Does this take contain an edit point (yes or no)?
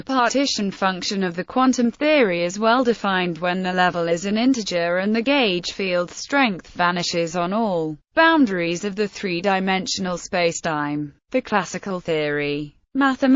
no